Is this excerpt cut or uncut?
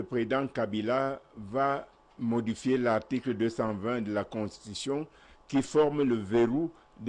uncut